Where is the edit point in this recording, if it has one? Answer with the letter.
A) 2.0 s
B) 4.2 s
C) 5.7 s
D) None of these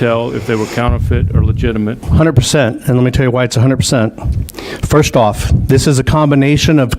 A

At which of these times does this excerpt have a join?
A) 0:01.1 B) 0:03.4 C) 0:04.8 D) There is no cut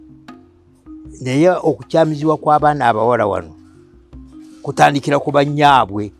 A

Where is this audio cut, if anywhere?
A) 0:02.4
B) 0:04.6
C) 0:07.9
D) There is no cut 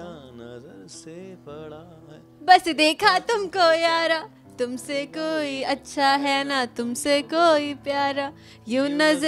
A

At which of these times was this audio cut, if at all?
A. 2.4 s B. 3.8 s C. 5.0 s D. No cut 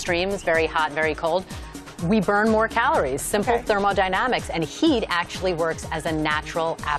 C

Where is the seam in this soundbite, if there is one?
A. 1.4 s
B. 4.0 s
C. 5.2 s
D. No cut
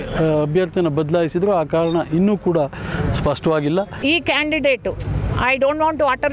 B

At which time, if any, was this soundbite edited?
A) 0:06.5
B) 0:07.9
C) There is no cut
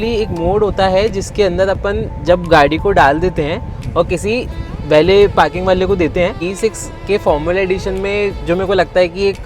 A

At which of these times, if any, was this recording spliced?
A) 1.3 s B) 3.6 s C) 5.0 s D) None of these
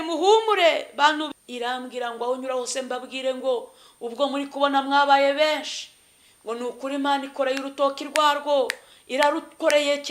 A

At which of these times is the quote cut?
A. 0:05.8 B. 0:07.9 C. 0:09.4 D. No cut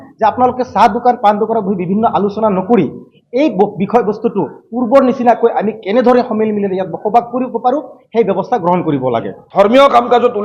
C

